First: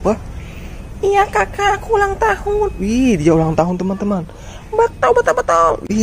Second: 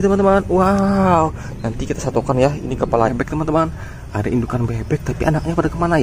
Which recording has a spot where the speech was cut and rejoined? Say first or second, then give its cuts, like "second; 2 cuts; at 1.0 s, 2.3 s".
second; 1 cut; at 3.1 s